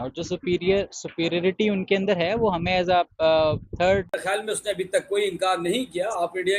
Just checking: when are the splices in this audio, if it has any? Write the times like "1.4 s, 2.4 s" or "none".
4.1 s